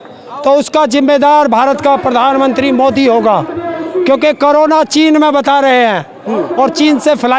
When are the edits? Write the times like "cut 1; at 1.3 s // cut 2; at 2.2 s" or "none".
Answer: none